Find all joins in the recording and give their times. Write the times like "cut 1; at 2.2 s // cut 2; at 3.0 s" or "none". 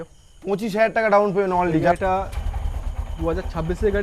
cut 1; at 1.9 s